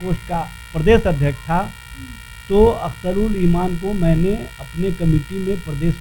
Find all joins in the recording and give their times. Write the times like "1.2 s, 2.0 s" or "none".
none